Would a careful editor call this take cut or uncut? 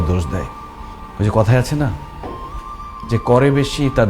uncut